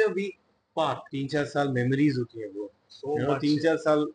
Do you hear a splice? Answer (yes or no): yes